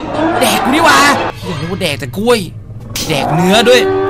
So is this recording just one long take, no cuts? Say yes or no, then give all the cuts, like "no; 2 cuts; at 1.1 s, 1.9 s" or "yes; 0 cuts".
no; 1 cut; at 1.3 s